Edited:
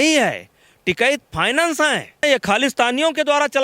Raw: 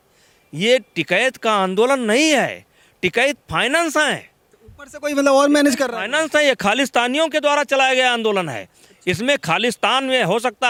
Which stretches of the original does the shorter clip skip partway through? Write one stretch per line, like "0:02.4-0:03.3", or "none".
0:04.4-0:06.4